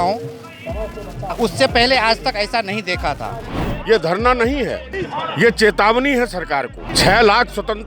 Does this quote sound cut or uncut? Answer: cut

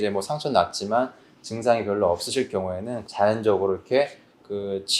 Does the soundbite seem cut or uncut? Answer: cut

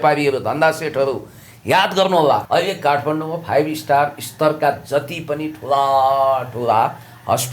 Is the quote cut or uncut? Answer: cut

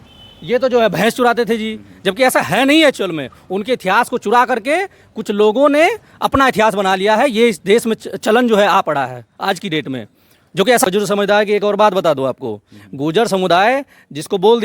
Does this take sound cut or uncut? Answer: cut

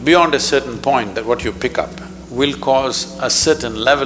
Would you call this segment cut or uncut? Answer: uncut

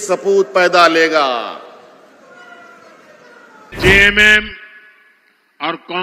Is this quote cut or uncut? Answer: cut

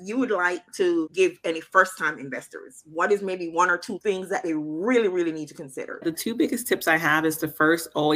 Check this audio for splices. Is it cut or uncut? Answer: cut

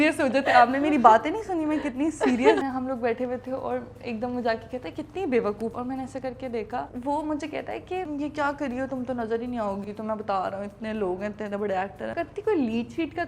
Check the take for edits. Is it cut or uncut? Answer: cut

